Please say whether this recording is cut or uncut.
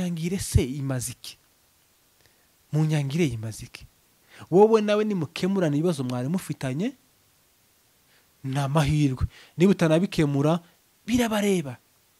uncut